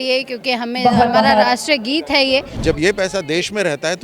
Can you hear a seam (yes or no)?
yes